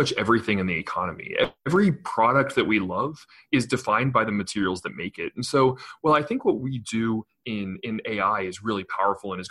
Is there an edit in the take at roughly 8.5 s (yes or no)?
no